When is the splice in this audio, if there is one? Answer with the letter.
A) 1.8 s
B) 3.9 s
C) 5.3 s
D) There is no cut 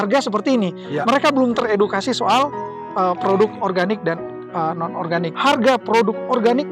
C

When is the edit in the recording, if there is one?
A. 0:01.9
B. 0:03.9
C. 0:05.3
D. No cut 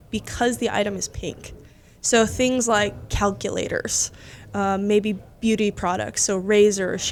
D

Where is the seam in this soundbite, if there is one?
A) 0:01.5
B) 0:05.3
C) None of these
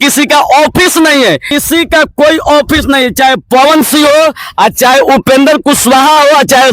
A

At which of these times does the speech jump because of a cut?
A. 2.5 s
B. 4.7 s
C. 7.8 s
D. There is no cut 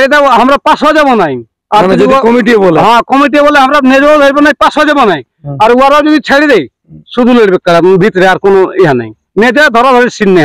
D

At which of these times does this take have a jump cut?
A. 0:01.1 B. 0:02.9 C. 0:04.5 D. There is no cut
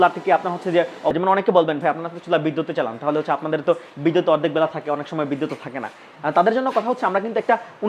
A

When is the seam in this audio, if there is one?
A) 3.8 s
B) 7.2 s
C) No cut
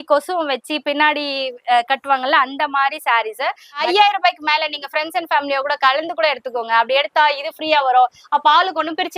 A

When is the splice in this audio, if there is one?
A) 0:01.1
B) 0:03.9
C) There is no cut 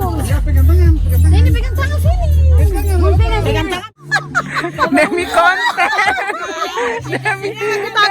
B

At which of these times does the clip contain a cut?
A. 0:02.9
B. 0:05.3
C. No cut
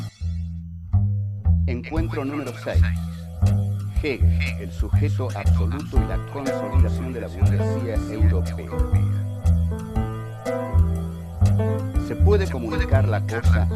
B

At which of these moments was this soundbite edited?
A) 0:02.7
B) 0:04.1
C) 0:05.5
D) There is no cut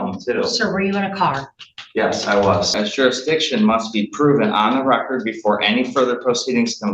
A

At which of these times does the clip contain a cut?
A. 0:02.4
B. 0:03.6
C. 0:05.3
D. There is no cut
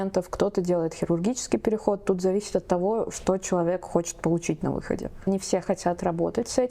C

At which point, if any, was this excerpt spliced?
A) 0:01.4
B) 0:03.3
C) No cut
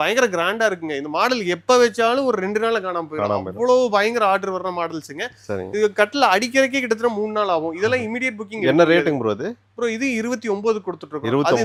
C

